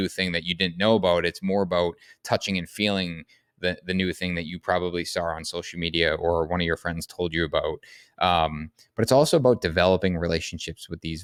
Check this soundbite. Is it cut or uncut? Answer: uncut